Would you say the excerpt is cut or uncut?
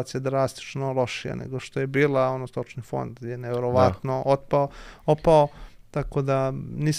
uncut